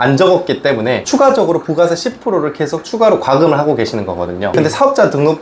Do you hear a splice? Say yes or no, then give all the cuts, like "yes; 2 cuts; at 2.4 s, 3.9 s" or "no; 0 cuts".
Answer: no; 0 cuts